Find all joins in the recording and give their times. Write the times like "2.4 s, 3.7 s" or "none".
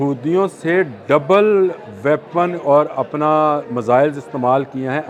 none